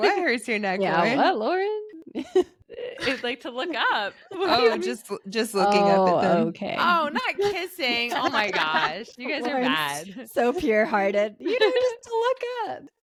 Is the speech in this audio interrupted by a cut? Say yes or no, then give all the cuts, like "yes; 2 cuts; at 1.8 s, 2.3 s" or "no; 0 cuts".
no; 0 cuts